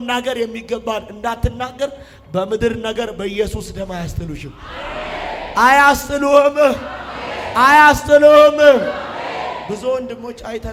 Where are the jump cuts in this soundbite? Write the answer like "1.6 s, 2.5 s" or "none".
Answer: none